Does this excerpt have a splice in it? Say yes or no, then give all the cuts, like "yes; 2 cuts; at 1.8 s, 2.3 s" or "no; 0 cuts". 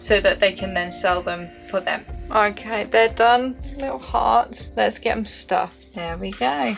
yes; 4 cuts; at 2.2 s, 3.7 s, 4.6 s, 5.9 s